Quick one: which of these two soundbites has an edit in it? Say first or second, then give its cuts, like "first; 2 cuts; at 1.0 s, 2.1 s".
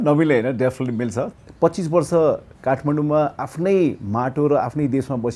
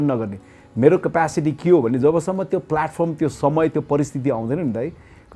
first; 1 cut; at 1.3 s